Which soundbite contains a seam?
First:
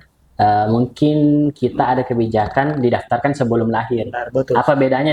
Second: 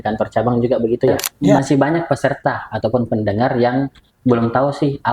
second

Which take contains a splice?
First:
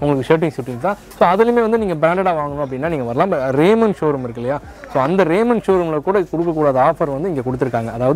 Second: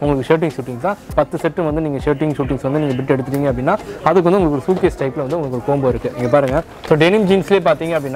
second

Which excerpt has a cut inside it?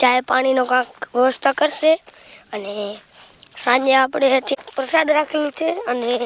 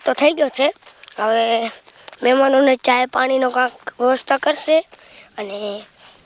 first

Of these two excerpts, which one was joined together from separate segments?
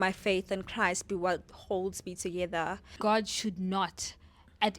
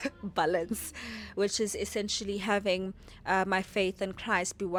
first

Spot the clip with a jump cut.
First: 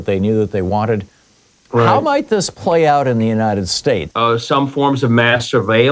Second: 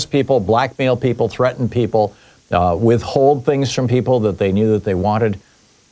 first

